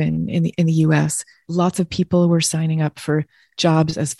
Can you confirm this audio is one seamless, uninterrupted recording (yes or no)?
yes